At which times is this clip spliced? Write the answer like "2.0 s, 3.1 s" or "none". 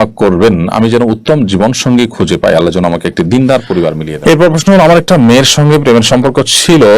4.0 s